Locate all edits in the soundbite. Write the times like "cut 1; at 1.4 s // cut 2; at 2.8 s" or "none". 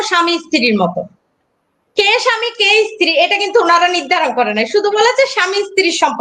none